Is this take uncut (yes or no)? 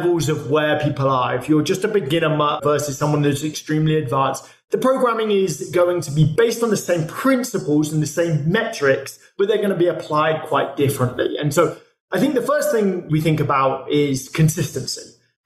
yes